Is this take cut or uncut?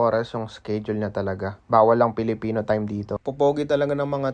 cut